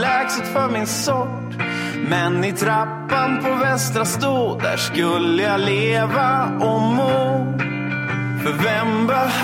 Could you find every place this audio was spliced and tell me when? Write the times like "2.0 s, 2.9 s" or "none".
none

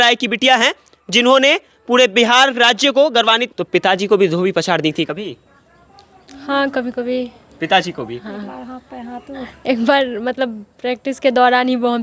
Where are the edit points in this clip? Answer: 3.5 s

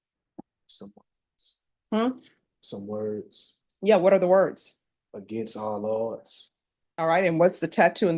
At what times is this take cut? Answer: none

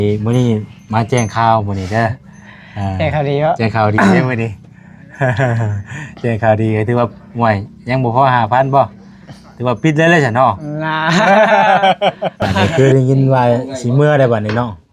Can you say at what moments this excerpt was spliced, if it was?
12.6 s

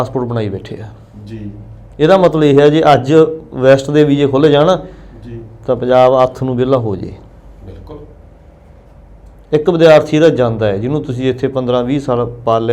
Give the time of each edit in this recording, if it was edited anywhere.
none

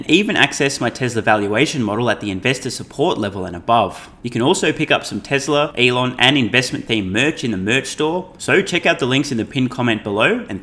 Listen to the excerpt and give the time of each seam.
4.1 s, 5.7 s, 8.3 s

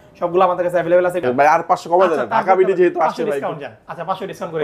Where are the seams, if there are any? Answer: 1.2 s

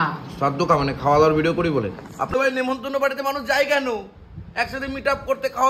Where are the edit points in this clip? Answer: 2.3 s

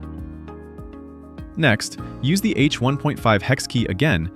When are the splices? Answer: 0.9 s

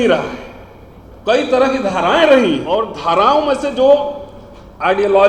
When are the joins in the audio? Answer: 2.7 s

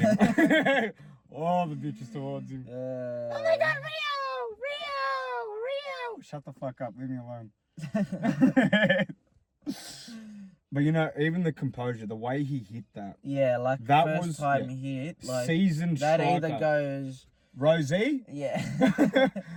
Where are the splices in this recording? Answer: none

